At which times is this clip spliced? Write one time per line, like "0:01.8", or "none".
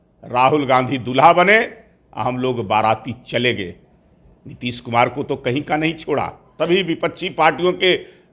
0:06.5